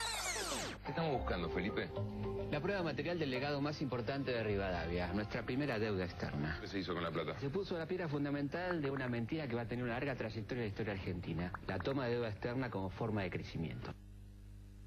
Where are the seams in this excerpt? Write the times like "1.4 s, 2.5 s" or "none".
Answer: 8.0 s